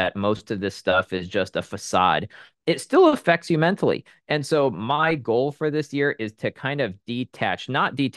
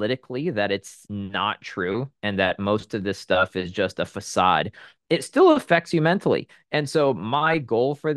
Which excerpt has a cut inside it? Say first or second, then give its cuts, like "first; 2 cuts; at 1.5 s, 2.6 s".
second; 1 cut; at 1.0 s